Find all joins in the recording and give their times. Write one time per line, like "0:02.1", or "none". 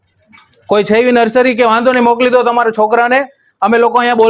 none